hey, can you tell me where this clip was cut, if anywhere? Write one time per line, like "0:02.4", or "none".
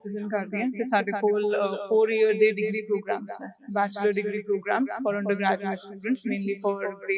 none